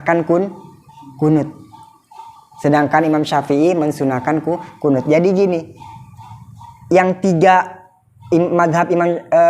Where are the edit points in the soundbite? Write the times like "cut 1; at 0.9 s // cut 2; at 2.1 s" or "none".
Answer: none